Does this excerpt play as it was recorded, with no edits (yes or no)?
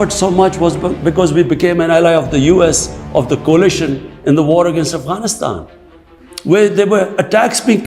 yes